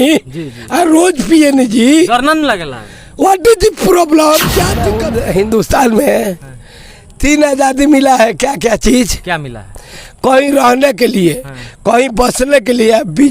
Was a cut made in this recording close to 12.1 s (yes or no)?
no